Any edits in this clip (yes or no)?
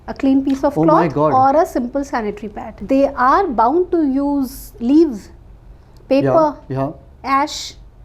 yes